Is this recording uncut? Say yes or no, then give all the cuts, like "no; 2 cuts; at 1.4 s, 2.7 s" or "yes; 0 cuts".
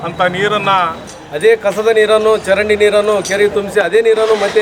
no; 1 cut; at 1.1 s